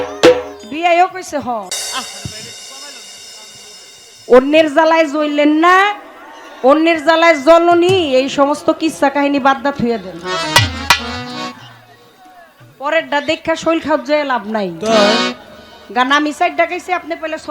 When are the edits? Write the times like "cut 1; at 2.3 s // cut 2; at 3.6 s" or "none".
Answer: cut 1; at 1.7 s